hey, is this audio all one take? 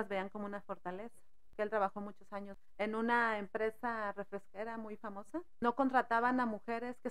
no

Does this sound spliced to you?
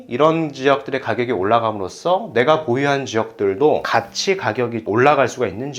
yes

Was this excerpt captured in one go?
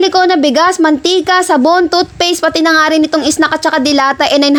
yes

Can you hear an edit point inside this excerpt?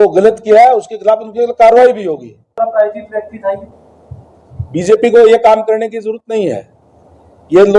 yes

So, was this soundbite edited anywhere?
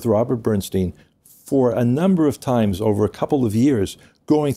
no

